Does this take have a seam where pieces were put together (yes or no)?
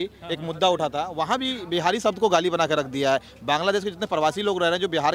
no